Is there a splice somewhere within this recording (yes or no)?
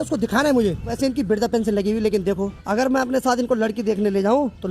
yes